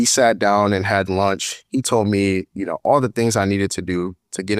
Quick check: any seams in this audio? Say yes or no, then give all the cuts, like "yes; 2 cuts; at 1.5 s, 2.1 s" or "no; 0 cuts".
no; 0 cuts